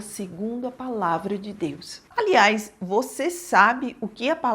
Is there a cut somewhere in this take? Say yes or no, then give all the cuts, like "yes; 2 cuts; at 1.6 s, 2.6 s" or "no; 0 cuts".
yes; 1 cut; at 2.0 s